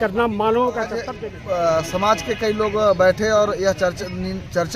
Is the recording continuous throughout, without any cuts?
no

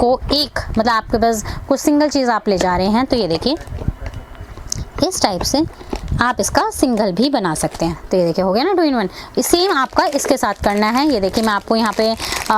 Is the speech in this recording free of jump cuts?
yes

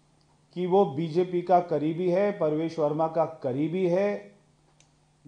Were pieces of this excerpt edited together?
no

